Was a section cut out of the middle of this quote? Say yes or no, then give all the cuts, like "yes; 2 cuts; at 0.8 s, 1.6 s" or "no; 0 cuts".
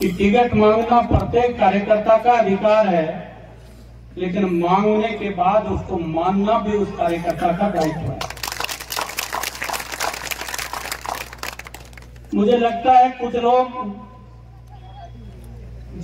no; 0 cuts